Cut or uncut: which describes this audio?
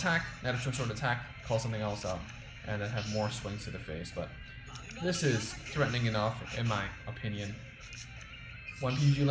uncut